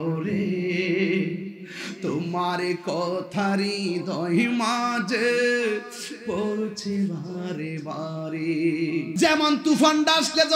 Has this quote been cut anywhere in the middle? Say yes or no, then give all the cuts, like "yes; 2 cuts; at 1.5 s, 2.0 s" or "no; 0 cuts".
yes; 1 cut; at 9.1 s